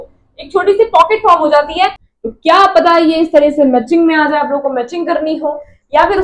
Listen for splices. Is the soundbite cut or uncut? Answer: cut